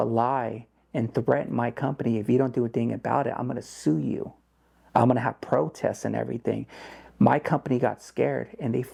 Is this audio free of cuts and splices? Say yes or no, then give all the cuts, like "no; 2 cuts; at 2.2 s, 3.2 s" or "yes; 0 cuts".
yes; 0 cuts